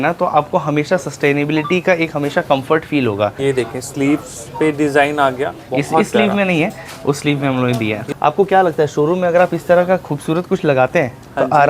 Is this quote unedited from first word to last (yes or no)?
no